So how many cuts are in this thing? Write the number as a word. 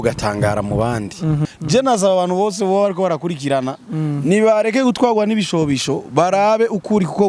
one